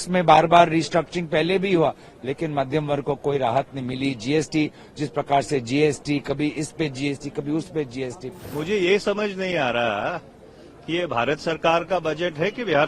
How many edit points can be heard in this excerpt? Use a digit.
1